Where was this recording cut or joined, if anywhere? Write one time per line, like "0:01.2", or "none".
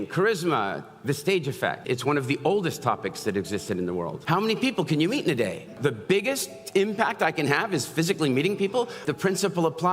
0:01.8
0:04.2
0:05.8
0:09.0